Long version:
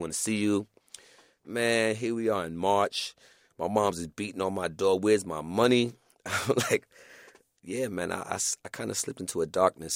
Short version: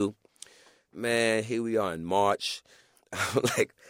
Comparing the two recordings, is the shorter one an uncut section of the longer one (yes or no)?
no